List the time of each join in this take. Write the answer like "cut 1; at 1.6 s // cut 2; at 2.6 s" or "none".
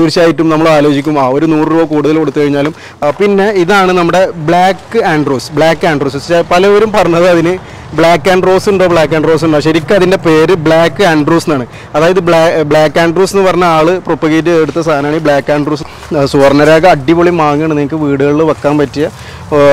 cut 1; at 2.8 s // cut 2; at 15.9 s